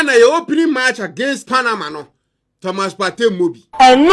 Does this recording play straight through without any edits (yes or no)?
yes